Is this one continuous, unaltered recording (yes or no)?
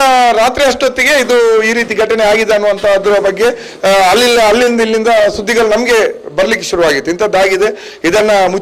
yes